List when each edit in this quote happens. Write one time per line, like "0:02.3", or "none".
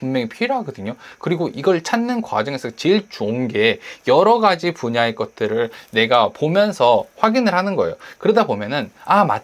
0:08.1